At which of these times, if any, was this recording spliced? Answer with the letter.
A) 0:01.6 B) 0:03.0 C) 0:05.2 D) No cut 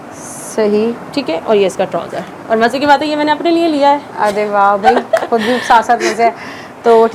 D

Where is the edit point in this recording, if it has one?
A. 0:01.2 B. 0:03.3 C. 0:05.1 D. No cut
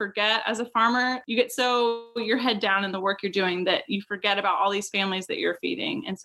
A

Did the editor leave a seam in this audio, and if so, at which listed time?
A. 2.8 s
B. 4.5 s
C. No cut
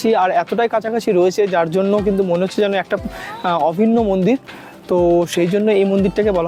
C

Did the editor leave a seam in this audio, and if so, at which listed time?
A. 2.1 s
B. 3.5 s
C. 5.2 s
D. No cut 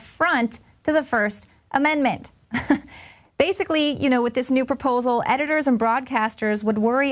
C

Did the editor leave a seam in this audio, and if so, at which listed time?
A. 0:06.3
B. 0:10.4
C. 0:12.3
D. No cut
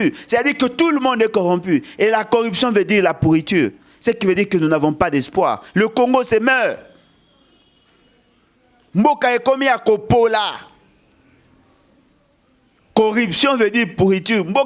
D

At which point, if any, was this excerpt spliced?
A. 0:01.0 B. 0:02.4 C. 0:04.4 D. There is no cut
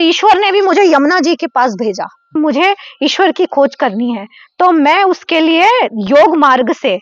B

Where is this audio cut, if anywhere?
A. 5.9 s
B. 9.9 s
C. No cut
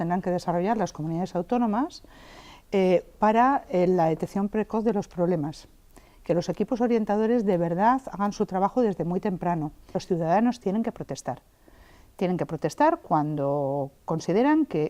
B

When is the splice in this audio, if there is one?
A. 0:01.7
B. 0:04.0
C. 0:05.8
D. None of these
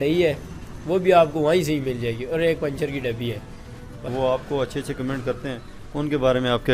B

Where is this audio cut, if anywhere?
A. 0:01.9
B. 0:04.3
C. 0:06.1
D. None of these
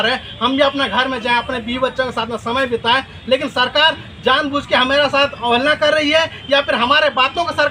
D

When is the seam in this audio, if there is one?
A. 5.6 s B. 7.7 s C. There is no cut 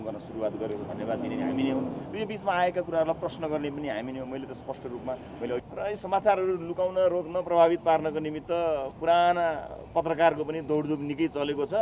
A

